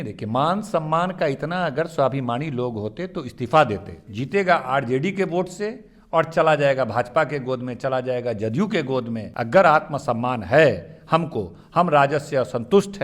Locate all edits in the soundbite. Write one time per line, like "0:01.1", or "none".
0:04.1
0:09.3